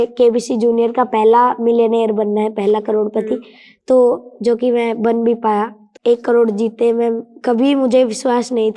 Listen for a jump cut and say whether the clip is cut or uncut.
cut